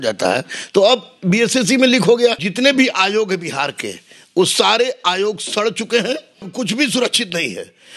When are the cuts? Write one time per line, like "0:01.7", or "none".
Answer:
0:02.4
0:06.5